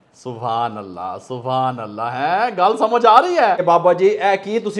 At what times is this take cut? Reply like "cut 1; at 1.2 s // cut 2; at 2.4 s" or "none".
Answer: cut 1; at 3.6 s